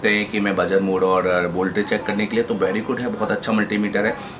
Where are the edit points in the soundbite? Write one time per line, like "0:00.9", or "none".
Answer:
none